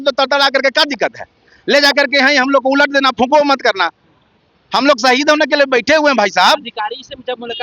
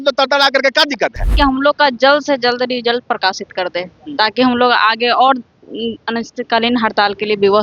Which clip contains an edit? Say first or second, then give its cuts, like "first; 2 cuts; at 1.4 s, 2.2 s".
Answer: second; 1 cut; at 1.3 s